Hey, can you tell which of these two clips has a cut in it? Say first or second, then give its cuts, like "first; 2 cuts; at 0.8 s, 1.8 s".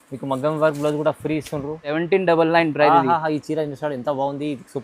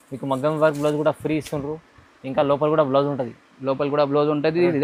first; 1 cut; at 1.9 s